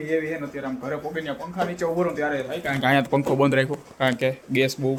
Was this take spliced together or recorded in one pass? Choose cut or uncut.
uncut